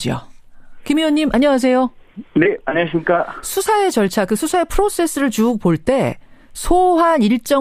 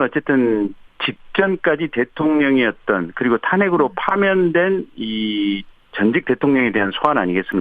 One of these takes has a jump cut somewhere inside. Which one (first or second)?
second